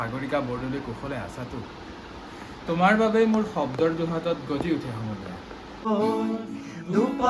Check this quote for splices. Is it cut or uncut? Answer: cut